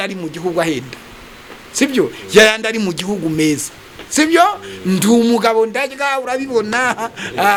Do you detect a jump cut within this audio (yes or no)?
no